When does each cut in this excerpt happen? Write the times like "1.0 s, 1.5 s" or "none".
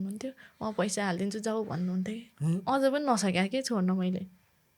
none